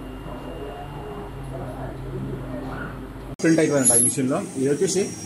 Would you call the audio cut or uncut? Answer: cut